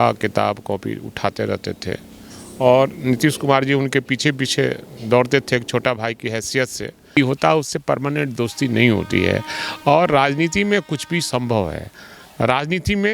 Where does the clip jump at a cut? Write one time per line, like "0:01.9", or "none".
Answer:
0:07.2